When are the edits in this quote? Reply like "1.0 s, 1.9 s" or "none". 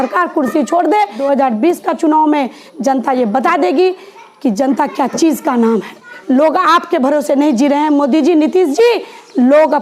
1.2 s, 6.1 s